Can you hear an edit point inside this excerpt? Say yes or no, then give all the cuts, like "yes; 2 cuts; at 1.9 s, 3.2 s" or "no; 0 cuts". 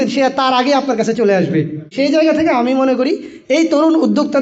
yes; 1 cut; at 1.9 s